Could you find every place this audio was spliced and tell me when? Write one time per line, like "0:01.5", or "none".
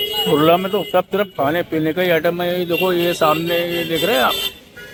none